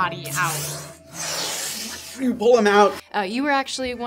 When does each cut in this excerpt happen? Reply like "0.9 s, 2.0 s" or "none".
3.0 s